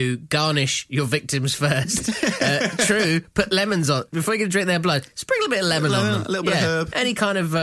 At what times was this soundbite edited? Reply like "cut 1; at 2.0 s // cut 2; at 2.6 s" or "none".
none